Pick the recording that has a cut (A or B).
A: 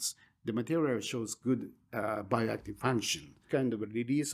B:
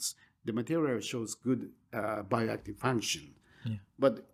A